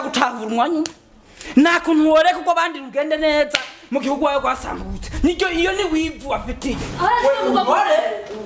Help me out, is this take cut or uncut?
uncut